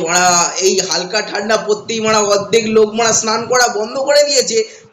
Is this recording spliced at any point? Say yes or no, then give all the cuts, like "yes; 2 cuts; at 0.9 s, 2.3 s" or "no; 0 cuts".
no; 0 cuts